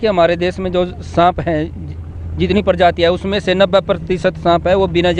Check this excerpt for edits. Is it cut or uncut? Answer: uncut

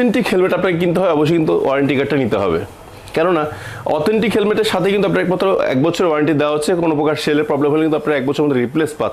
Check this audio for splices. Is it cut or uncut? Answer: uncut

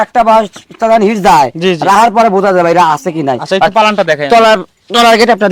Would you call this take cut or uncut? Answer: uncut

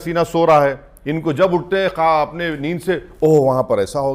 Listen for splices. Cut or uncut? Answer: uncut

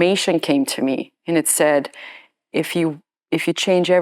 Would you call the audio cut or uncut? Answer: uncut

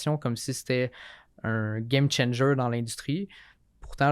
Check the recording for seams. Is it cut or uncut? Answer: uncut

